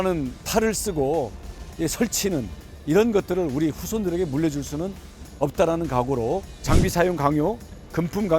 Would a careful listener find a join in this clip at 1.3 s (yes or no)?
no